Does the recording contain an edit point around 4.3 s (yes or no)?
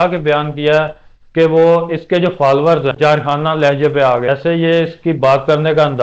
yes